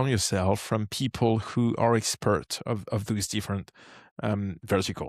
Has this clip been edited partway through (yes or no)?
no